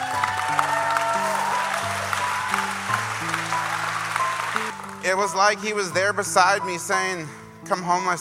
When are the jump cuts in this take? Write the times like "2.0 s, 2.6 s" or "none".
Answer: 4.7 s